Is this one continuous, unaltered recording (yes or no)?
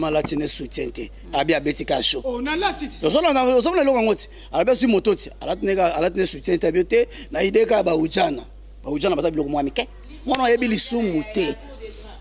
yes